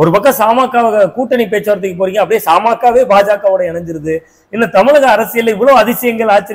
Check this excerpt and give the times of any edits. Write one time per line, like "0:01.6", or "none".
none